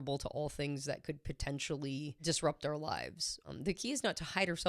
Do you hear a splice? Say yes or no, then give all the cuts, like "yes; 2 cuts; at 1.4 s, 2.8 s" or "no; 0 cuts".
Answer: yes; 2 cuts; at 2.2 s, 3.3 s